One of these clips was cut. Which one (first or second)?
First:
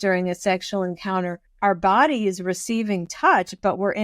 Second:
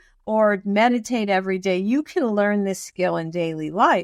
first